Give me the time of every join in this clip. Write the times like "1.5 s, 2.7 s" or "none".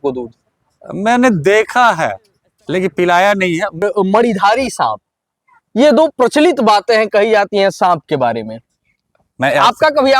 3.8 s